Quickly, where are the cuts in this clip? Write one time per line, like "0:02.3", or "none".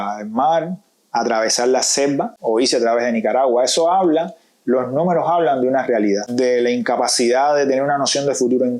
0:02.3